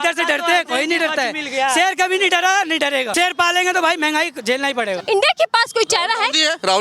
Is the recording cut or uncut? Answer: cut